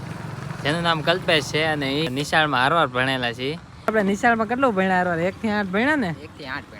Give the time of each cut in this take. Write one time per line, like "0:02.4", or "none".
0:02.1
0:03.9